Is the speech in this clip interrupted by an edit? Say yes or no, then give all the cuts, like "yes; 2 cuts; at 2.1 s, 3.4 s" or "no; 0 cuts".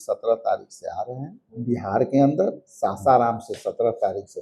yes; 1 cut; at 1.5 s